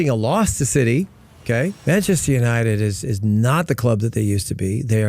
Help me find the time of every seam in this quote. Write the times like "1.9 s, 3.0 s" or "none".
1.8 s